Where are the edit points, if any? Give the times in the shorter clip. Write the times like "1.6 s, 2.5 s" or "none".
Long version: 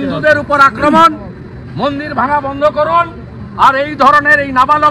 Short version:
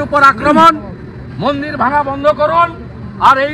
none